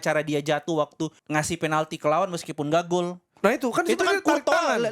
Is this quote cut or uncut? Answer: cut